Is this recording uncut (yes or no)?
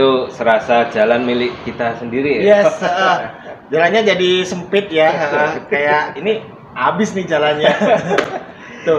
yes